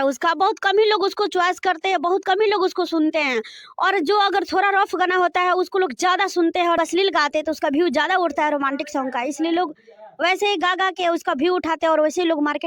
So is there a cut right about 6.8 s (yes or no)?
yes